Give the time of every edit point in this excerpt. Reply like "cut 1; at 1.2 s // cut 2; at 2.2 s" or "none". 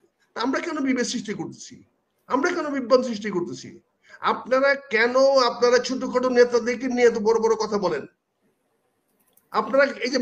none

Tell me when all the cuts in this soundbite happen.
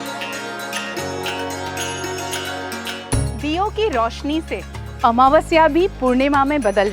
cut 1; at 0.9 s

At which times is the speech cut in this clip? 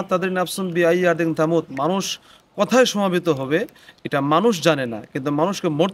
none

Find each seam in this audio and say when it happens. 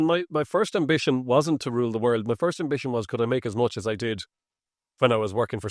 none

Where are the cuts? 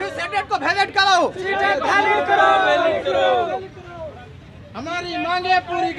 none

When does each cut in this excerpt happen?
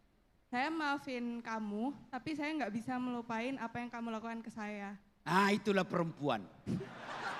none

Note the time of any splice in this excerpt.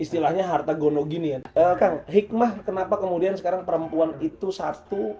cut 1; at 1.4 s

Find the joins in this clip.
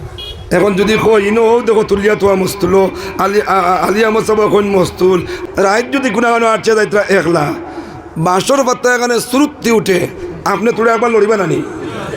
cut 1; at 5.4 s

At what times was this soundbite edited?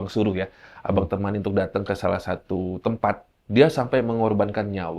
cut 1; at 3.3 s

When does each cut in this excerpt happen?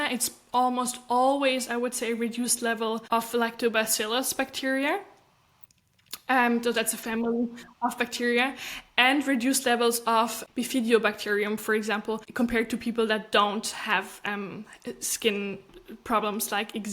cut 1; at 3.0 s // cut 2; at 10.4 s // cut 3; at 12.3 s

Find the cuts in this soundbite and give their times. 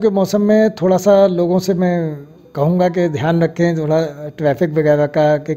none

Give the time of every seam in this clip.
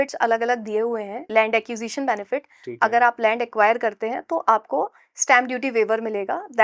cut 1; at 1.1 s

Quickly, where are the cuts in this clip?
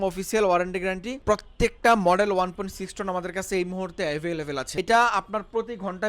cut 1; at 1.1 s // cut 2; at 4.6 s

